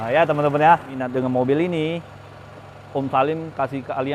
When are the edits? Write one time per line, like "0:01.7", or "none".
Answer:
0:01.0